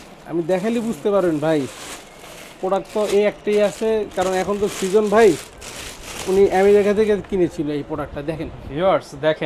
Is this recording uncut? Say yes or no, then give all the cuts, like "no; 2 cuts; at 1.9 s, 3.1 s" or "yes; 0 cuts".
yes; 0 cuts